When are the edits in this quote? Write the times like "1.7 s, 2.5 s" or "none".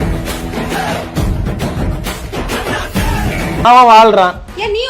3.6 s

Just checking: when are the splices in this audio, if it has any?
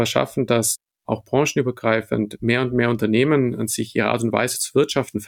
none

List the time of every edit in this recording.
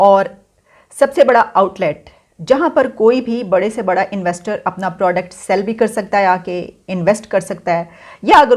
none

